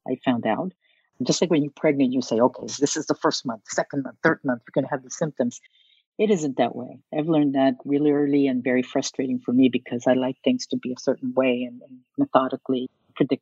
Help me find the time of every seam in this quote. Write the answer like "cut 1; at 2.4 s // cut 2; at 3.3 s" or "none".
none